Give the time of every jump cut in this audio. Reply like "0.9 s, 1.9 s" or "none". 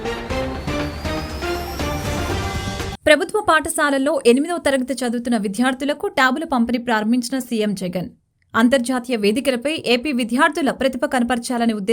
2.9 s

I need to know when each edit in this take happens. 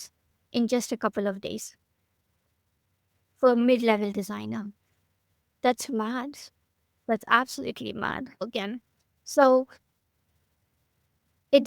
8.4 s

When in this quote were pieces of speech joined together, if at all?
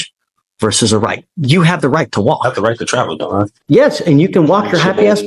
3.5 s

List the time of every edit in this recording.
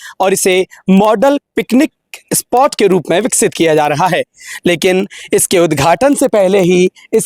none

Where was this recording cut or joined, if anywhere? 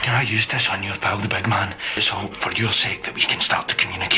2.0 s

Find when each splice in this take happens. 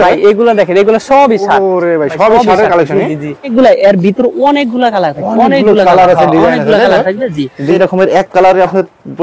3.5 s, 7.8 s

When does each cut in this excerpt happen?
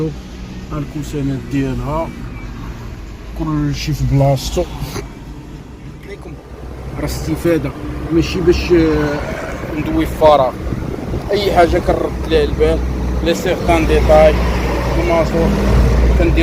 6.4 s

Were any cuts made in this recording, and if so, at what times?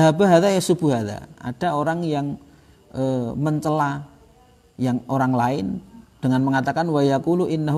none

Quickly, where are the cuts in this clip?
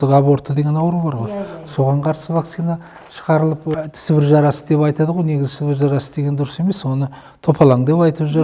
3.7 s

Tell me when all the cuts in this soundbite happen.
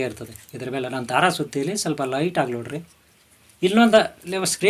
none

